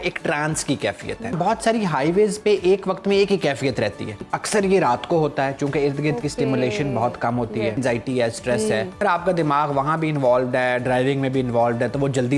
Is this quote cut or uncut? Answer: cut